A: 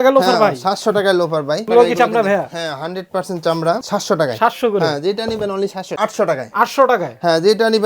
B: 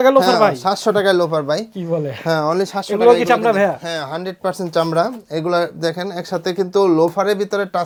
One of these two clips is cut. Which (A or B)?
A